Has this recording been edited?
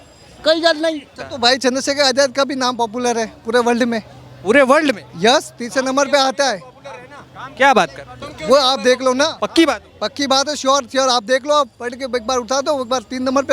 yes; 1 cut; at 1.1 s

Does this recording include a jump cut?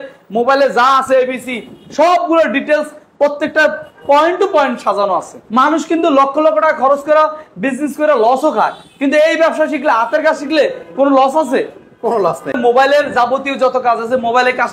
yes; 2 cuts; at 5.4 s, 12.5 s

